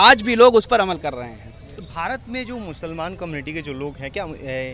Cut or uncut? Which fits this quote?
uncut